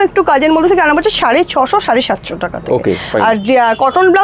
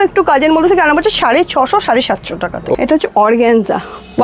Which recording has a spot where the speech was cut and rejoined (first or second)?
second